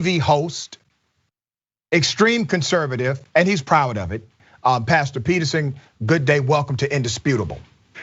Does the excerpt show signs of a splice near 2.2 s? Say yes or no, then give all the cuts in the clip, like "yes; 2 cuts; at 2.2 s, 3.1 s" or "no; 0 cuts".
no; 1 cut; at 4.4 s